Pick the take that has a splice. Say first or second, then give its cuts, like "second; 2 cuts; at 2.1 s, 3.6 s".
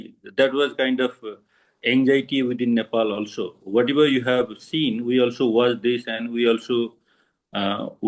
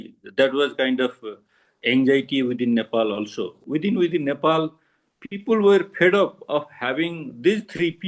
second; 1 cut; at 3.6 s